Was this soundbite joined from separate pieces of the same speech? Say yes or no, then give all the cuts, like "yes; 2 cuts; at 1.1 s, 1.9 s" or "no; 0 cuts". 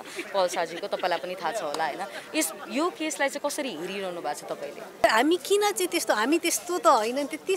yes; 1 cut; at 5.0 s